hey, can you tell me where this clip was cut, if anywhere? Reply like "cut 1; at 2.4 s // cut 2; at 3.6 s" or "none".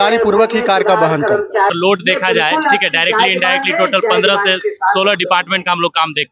cut 1; at 1.7 s